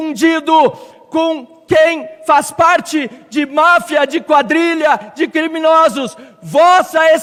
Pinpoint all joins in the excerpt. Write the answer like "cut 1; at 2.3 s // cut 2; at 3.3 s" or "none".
none